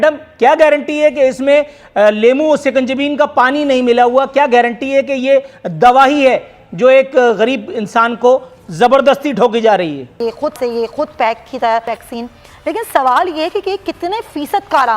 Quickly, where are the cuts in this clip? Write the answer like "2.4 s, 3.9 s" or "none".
10.2 s, 11.9 s